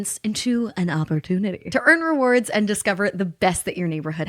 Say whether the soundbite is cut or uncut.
cut